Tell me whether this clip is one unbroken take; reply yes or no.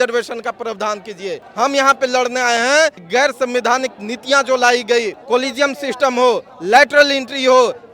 no